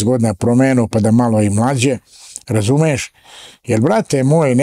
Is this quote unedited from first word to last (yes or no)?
yes